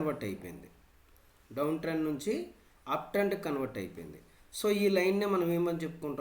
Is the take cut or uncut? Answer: uncut